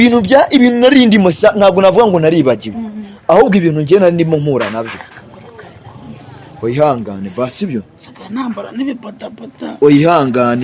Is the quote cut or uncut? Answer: uncut